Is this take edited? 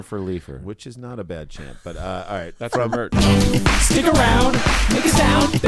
yes; 1 cut; at 3.1 s

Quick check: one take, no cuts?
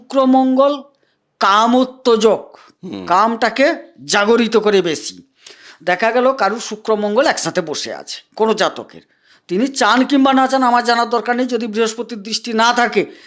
yes; 0 cuts

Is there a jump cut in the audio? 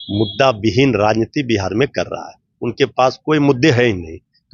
no; 0 cuts

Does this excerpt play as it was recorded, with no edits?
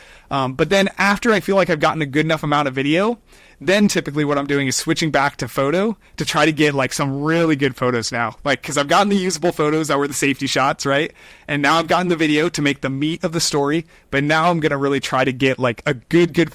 yes; 0 cuts

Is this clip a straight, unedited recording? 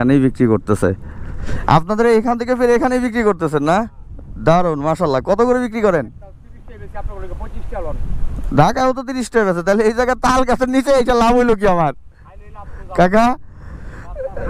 yes; 0 cuts

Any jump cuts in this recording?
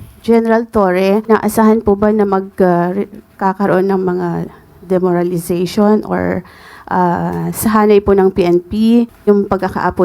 yes; 2 cuts; at 1.2 s, 9.1 s

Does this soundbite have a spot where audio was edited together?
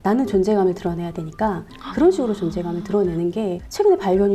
yes; 1 cut; at 1.8 s

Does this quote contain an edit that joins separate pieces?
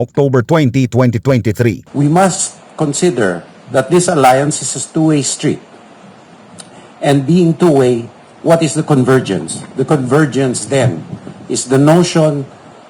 no; 0 cuts

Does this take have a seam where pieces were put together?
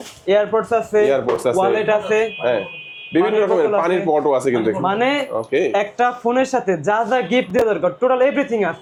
no; 0 cuts

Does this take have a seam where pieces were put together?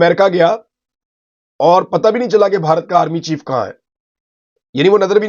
no; 0 cuts

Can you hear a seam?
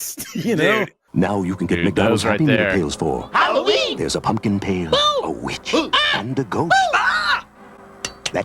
yes; 1 cut; at 1.0 s

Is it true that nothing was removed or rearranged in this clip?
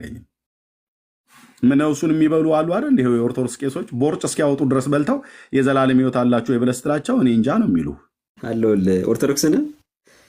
no; 1 cut; at 8.4 s

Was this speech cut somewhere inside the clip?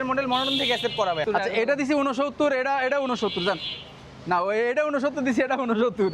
yes; 1 cut; at 1.2 s

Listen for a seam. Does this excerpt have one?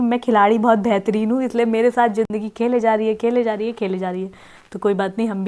no; 0 cuts

